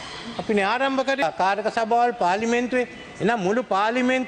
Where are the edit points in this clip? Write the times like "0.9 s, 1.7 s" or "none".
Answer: 1.2 s